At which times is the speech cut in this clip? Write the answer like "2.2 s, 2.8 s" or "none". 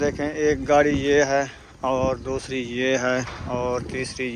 none